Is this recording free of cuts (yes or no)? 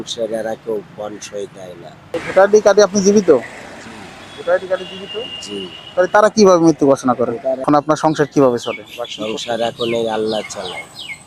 no